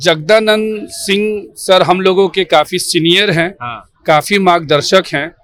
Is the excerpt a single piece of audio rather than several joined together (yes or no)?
yes